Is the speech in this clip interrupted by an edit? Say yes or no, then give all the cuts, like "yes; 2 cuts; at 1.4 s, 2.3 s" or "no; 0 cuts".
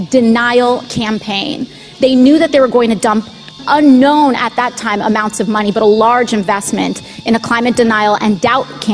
yes; 1 cut; at 3.6 s